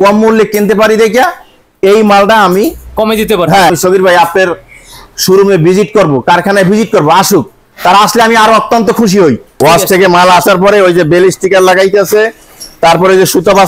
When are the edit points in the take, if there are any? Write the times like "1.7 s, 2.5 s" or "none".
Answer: 3.7 s, 9.6 s

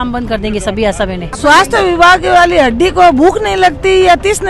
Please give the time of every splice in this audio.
1.2 s

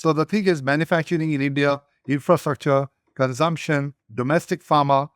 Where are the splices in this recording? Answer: 4.0 s

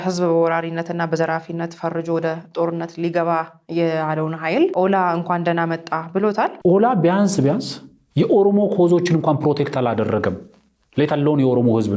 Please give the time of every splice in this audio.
6.5 s

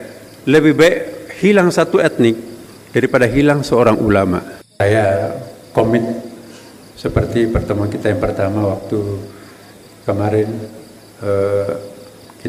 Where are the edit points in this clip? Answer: 4.6 s

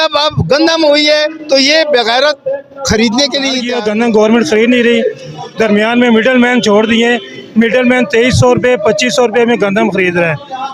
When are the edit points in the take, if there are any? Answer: 3.7 s

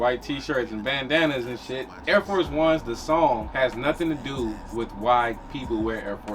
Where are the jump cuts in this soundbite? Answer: 1.9 s, 3.5 s

